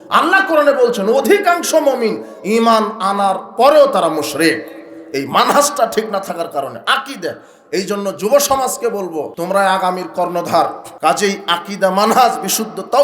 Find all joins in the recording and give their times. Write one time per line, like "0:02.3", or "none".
0:09.3
0:10.8